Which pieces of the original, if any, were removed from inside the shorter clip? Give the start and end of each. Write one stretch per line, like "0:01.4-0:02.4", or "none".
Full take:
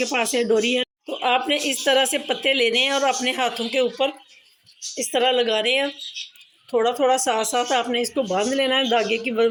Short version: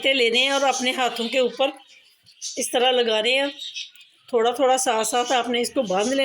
none